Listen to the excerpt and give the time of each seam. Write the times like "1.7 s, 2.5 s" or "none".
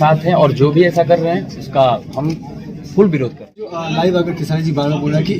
3.8 s